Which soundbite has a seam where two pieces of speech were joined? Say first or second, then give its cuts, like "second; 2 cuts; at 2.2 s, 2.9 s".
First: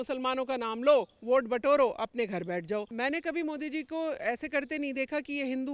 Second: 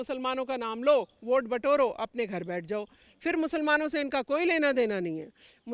first; 1 cut; at 2.9 s